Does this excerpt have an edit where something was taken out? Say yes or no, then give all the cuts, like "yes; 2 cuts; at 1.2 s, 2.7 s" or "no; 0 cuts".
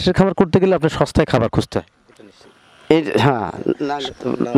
no; 0 cuts